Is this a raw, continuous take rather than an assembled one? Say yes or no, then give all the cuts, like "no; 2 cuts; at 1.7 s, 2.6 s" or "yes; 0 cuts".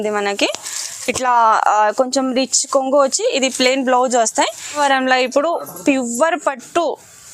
no; 1 cut; at 4.8 s